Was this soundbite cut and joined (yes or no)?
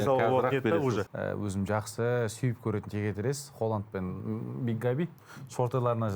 yes